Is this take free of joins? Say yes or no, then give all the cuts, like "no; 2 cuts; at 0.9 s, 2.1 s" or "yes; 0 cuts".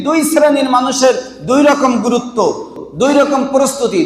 no; 1 cut; at 2.8 s